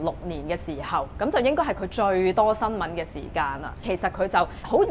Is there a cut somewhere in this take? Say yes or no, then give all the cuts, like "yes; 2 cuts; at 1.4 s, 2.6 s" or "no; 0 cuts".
yes; 1 cut; at 3.9 s